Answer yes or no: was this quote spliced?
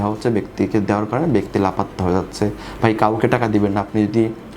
no